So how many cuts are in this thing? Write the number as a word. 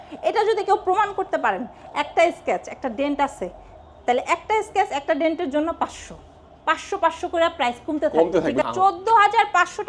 one